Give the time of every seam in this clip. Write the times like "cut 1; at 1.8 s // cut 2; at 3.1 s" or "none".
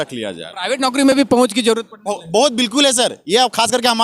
none

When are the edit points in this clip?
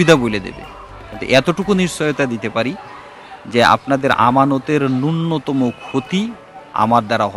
none

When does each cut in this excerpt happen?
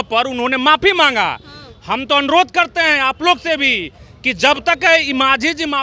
none

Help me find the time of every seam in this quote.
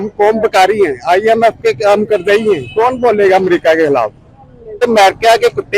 cut 1; at 4.8 s

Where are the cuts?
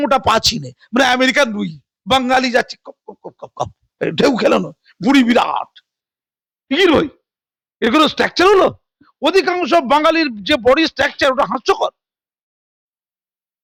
none

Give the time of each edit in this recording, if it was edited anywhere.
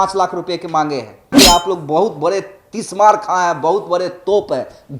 cut 1; at 1.3 s

